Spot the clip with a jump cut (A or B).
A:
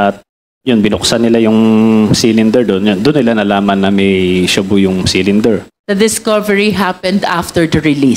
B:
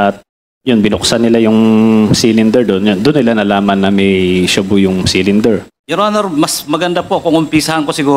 B